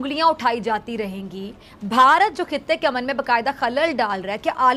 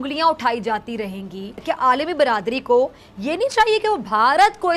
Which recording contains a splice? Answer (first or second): second